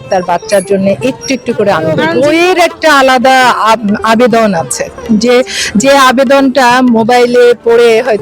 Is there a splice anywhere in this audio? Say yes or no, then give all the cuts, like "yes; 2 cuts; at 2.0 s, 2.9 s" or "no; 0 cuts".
yes; 1 cut; at 2.1 s